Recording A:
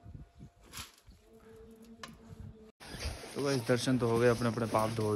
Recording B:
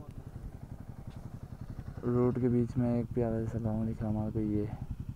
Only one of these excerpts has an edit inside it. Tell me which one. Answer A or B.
A